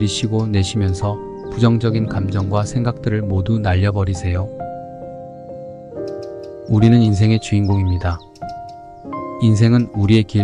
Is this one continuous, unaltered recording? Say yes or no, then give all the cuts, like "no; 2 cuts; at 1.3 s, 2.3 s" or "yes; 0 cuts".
yes; 0 cuts